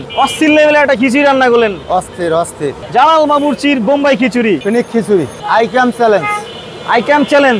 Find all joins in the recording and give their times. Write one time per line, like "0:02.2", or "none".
none